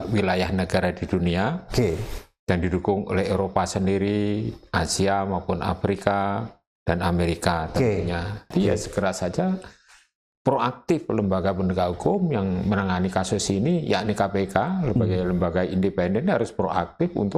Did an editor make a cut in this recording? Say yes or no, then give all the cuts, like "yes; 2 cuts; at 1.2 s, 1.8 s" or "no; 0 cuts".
yes; 1 cut; at 8.5 s